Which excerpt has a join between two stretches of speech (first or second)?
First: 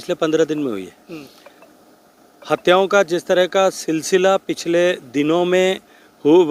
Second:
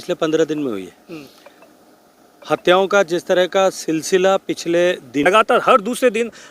second